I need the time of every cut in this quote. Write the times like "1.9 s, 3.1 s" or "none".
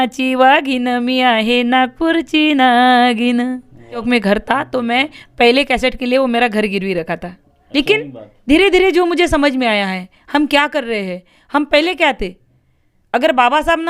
4.0 s, 7.7 s